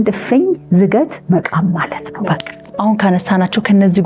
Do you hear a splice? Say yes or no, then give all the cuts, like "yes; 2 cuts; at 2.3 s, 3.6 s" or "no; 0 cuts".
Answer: yes; 1 cut; at 2.2 s